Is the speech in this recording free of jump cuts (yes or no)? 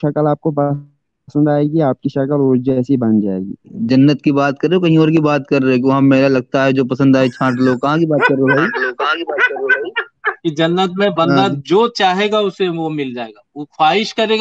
no